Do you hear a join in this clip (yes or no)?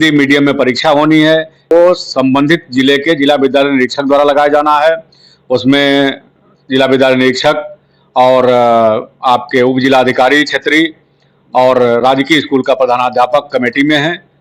yes